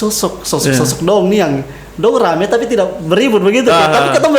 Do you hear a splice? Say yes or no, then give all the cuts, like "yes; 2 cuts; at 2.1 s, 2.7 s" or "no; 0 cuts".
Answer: no; 0 cuts